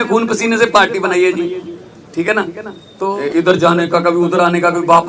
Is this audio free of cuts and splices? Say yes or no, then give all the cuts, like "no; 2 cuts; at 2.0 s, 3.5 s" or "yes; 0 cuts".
no; 1 cut; at 3.1 s